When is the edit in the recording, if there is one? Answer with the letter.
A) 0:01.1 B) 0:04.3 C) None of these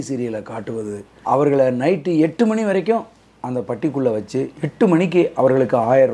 A